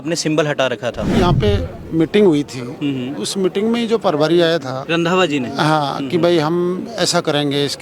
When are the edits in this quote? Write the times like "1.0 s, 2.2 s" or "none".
1.1 s, 4.8 s